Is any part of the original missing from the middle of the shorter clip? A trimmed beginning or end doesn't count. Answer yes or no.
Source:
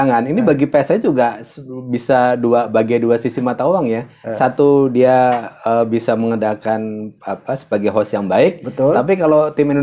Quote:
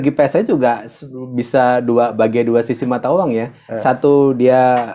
no